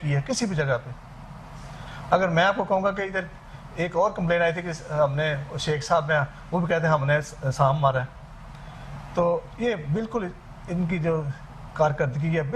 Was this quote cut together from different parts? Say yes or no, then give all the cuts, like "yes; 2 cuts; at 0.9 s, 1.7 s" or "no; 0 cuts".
no; 0 cuts